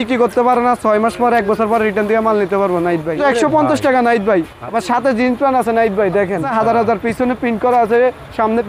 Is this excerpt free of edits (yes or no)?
no